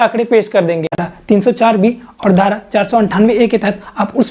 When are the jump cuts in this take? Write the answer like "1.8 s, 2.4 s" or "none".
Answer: 1.1 s